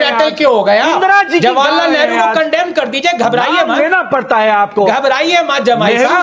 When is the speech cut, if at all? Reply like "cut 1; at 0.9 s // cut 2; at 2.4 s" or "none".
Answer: none